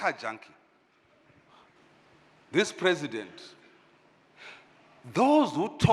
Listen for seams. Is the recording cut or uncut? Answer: cut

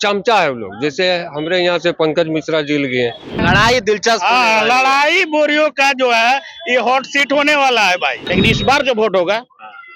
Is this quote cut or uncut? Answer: cut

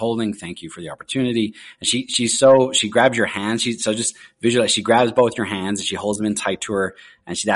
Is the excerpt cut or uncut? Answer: uncut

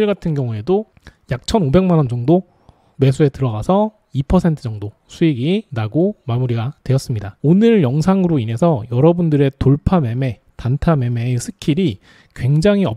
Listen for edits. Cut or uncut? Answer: cut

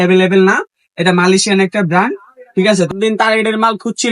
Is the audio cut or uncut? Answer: cut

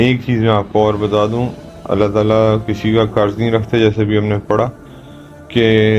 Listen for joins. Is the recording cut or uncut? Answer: uncut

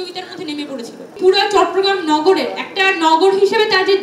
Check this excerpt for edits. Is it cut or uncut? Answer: cut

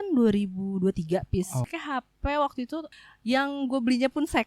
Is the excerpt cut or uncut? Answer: cut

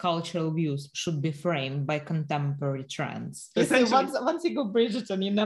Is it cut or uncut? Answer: cut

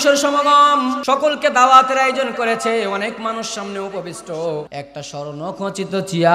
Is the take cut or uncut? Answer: cut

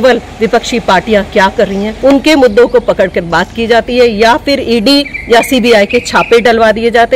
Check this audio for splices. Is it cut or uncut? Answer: cut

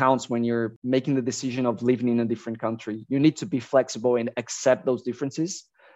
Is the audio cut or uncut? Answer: uncut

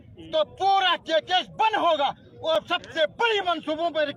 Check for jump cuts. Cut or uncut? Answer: uncut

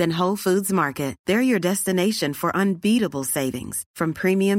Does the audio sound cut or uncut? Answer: uncut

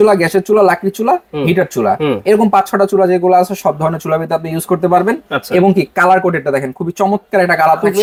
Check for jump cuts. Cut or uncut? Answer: uncut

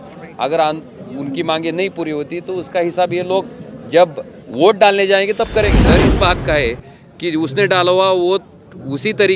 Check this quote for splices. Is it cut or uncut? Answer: cut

